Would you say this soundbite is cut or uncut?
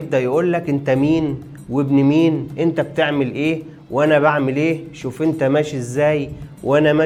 uncut